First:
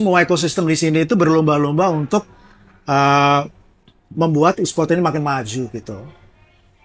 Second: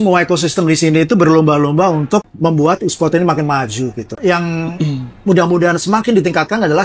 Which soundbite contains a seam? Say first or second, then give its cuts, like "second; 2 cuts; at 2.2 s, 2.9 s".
second; 2 cuts; at 2.3 s, 4.2 s